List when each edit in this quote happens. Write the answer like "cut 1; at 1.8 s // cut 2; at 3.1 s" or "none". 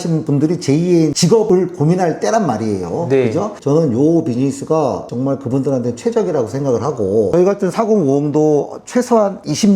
cut 1; at 1.2 s // cut 2; at 7.3 s